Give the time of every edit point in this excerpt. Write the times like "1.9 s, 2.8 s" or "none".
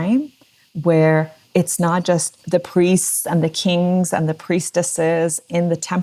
1.4 s, 2.4 s

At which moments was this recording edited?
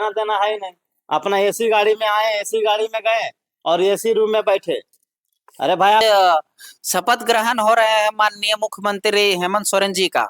6.0 s

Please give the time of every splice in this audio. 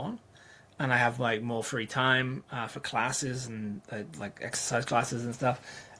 none

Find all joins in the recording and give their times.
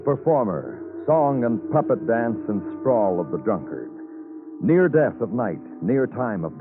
3.9 s

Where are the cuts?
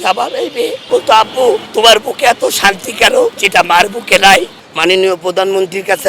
0.8 s, 4.5 s

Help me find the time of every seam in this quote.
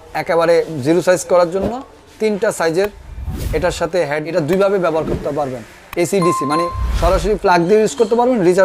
4.2 s

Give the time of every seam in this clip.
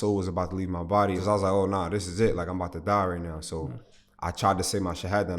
1.2 s

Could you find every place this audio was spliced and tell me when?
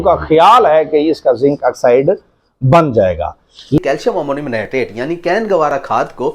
3.8 s

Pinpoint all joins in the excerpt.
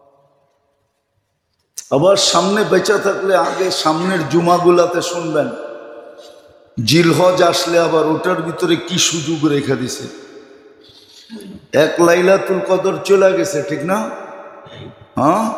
none

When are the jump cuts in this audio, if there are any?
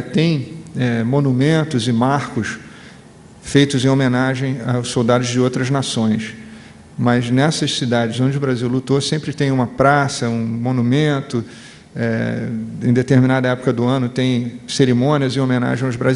none

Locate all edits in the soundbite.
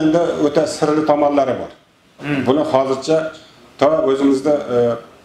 none

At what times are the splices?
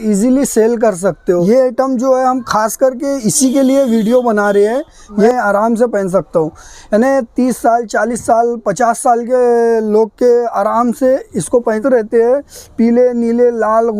1.4 s, 5.3 s, 11.8 s

